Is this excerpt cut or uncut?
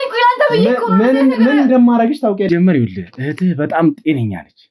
cut